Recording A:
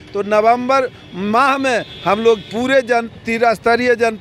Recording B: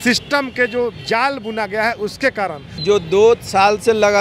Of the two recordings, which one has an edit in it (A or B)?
B